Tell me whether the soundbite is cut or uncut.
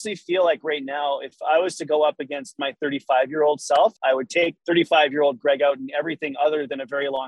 cut